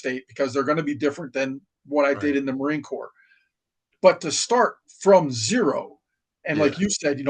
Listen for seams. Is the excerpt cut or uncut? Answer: uncut